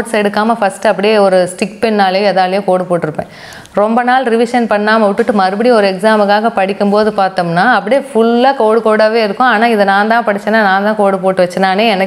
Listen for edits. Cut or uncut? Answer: uncut